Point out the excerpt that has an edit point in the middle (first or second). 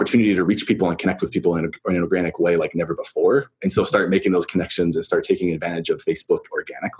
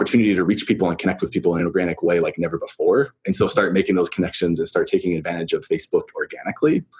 second